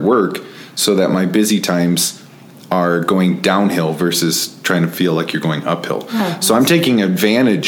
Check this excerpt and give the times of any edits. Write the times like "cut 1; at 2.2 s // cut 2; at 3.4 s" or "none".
none